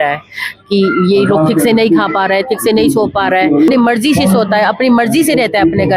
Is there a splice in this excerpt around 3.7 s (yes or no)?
yes